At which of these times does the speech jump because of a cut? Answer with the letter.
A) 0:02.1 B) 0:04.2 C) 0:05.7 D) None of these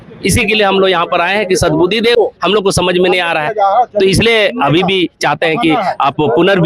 A